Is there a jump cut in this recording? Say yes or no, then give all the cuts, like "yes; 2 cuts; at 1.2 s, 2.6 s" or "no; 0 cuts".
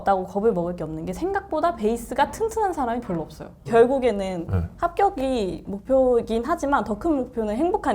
yes; 1 cut; at 3.5 s